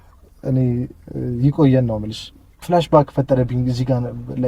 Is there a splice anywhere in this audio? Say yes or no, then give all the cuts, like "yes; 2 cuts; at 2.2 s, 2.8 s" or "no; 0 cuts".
yes; 1 cut; at 2.5 s